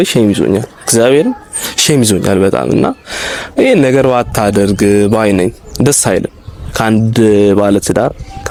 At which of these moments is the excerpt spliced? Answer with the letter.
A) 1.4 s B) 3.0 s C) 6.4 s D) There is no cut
D